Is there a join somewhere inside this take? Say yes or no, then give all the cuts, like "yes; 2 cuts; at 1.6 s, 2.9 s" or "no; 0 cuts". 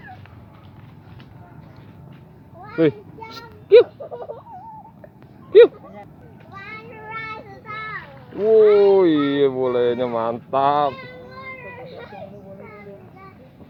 no; 0 cuts